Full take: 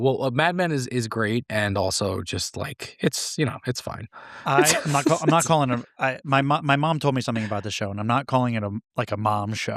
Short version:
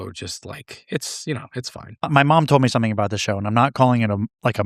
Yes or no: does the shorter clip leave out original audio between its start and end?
yes